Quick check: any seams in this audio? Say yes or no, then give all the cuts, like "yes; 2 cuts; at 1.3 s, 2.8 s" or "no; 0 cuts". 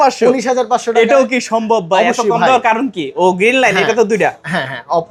no; 0 cuts